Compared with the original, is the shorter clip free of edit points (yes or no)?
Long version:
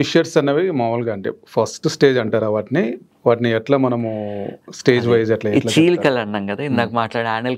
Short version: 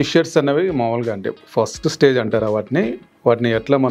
yes